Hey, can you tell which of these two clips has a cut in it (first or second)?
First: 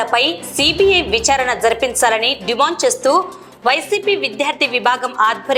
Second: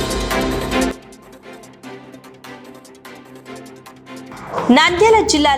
second